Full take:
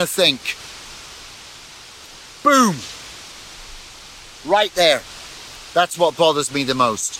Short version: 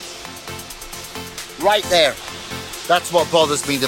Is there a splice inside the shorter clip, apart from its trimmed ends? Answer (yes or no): no